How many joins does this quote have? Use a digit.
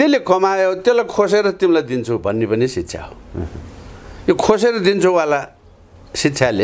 0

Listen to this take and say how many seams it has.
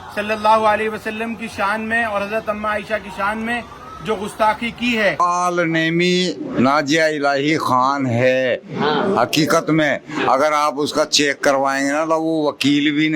1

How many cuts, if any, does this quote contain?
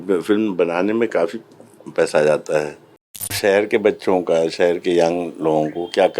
1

